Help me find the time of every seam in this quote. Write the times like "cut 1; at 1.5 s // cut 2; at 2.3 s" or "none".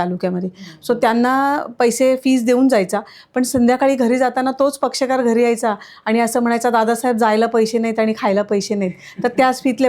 none